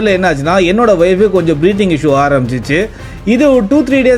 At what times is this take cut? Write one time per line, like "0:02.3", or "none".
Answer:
none